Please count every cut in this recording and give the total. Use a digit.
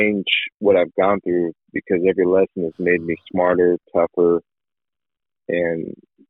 0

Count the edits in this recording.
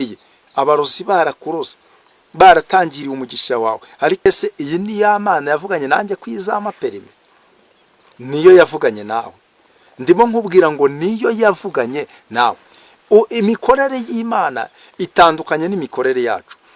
1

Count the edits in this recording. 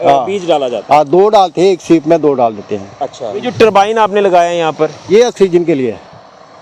1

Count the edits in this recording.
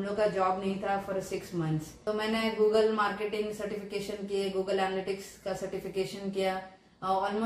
1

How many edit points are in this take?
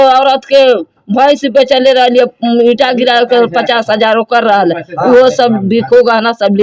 0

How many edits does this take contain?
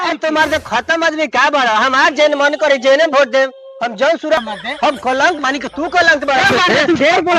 1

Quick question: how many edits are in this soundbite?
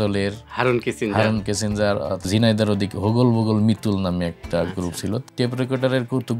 2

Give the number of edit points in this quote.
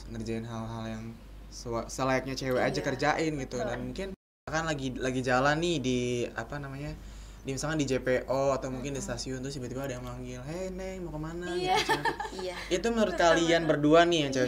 1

